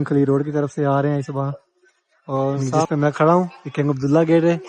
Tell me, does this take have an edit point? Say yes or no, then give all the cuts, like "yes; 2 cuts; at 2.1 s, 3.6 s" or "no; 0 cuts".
yes; 1 cut; at 2.9 s